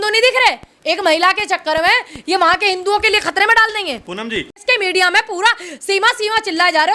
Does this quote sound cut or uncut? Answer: cut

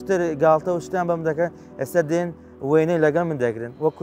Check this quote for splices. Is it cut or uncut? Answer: uncut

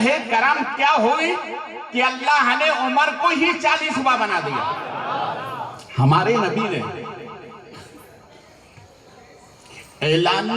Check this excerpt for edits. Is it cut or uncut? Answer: cut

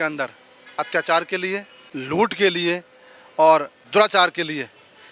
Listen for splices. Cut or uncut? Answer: cut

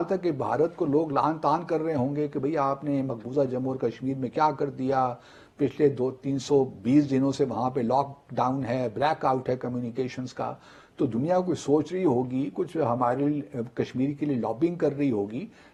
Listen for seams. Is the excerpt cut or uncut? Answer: uncut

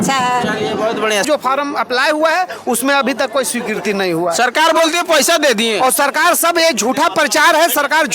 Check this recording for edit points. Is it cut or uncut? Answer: cut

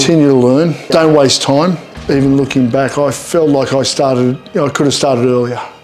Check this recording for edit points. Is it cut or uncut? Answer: cut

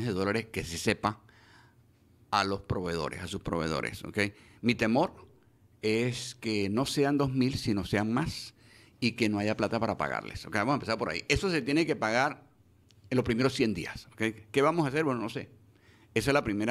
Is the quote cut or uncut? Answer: uncut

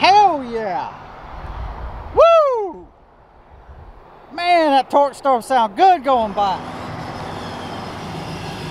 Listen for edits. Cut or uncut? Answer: cut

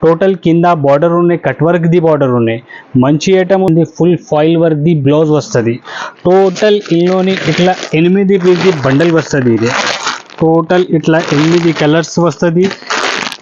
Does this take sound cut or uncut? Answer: cut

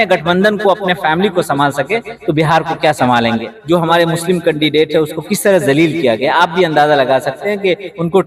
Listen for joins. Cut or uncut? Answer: cut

